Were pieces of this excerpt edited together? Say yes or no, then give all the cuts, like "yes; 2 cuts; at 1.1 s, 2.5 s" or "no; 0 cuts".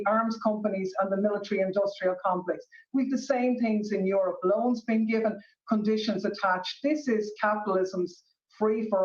yes; 1 cut; at 7.4 s